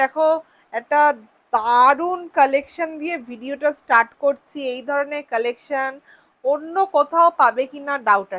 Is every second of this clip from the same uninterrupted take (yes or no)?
yes